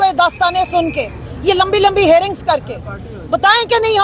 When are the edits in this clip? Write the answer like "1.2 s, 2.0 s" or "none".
none